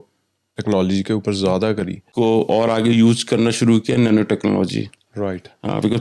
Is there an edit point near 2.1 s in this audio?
yes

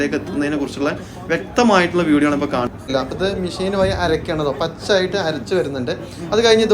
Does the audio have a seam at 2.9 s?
yes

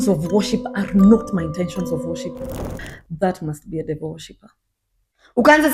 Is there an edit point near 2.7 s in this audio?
yes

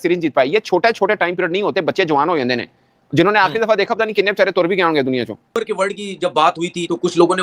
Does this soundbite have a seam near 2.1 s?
no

